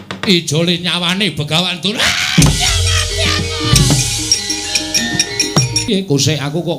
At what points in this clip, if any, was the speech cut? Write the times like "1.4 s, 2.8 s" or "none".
5.9 s